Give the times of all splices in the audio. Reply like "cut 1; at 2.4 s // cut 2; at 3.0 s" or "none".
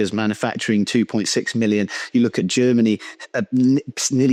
none